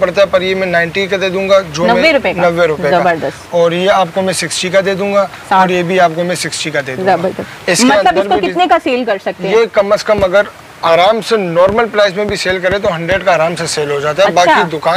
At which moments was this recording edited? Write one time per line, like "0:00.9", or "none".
none